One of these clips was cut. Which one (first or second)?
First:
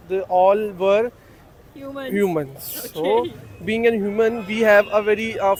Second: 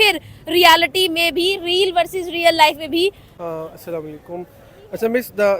second